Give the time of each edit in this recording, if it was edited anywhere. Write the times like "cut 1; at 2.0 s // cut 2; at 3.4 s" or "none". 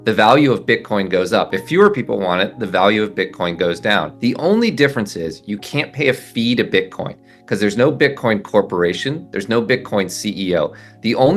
cut 1; at 4.1 s

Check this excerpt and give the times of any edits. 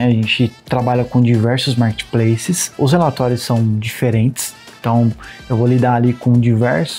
none

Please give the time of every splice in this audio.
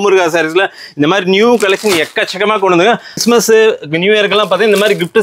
cut 1; at 3.1 s

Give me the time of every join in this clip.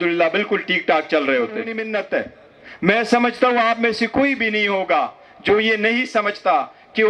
cut 1; at 1.8 s

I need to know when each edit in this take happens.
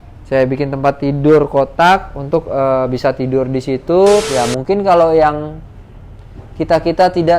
cut 1; at 4.2 s

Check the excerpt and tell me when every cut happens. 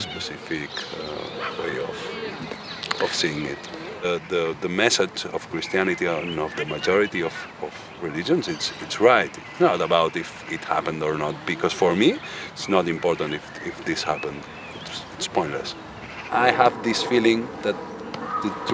cut 1; at 4.0 s // cut 2; at 16.2 s

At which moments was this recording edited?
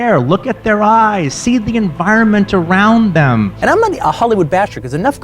cut 1; at 3.5 s

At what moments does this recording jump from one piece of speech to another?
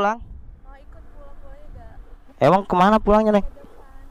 cut 1; at 2.2 s

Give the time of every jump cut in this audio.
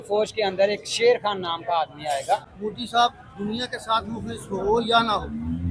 cut 1; at 2.5 s

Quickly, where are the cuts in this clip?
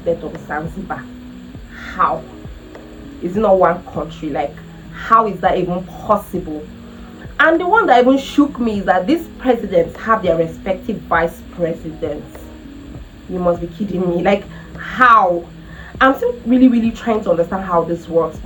none

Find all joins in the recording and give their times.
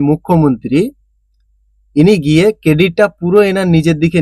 none

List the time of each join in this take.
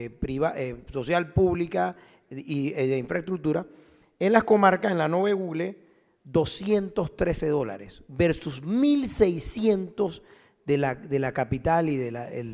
cut 1; at 10.8 s

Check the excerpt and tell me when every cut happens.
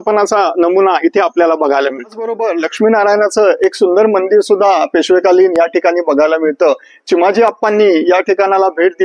cut 1; at 2.4 s

